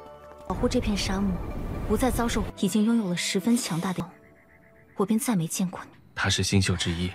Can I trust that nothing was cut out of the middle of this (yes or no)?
yes